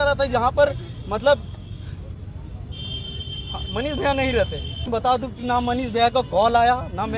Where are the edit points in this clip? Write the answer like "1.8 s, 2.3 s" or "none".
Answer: 4.9 s